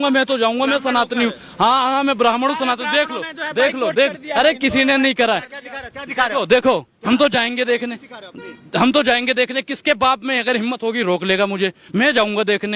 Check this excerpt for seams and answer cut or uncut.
uncut